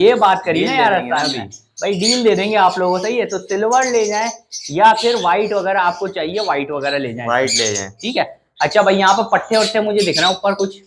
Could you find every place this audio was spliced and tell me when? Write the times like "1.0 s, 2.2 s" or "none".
none